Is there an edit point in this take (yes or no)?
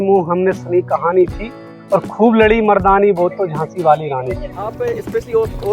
yes